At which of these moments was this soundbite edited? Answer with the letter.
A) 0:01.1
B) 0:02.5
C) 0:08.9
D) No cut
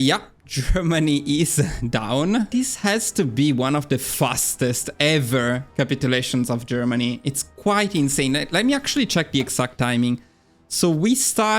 B